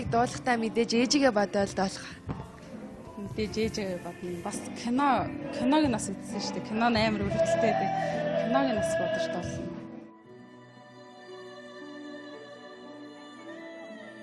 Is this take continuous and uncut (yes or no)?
yes